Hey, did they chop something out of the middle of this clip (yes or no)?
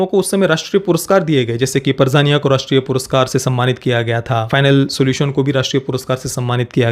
yes